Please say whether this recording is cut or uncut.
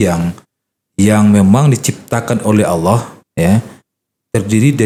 uncut